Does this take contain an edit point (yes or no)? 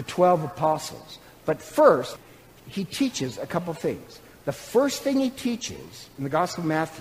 yes